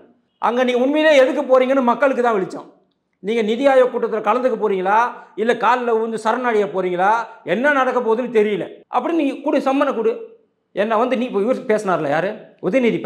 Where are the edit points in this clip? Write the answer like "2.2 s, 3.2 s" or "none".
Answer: 8.8 s